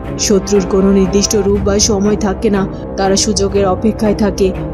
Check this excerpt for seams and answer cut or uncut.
uncut